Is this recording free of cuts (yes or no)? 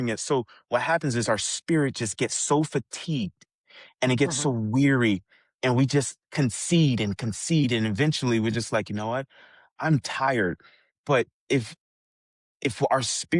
yes